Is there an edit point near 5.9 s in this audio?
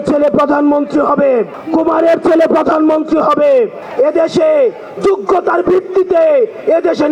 no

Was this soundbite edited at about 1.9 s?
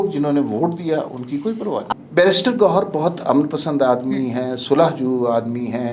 yes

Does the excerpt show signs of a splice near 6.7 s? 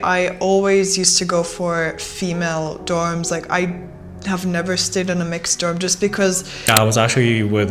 yes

